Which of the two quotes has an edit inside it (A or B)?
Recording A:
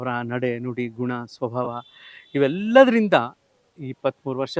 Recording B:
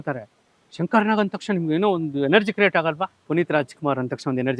B